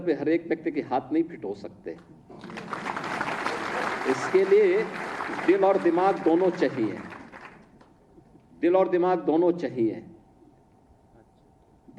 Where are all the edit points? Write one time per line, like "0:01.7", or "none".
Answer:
0:01.8